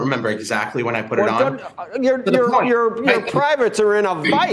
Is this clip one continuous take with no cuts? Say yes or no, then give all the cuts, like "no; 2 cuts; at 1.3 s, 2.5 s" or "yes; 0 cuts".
no; 1 cut; at 1.7 s